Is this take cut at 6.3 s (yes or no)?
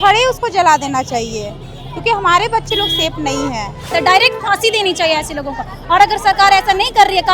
no